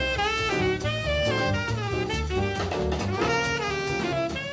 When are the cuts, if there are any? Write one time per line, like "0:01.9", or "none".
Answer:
0:03.6